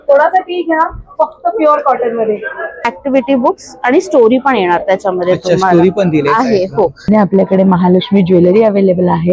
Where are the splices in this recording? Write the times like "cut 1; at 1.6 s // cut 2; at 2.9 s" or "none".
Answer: cut 1; at 2.9 s // cut 2; at 7.1 s